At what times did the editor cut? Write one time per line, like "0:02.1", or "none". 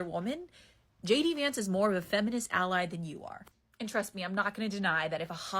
0:04.5